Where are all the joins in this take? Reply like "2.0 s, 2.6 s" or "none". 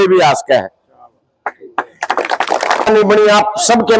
2.9 s